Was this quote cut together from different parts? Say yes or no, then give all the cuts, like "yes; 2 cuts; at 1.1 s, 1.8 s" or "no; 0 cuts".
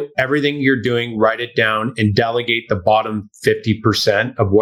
no; 0 cuts